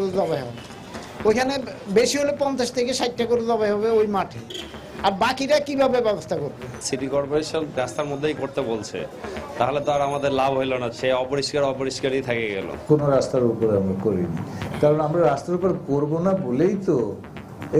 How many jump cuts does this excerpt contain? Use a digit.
3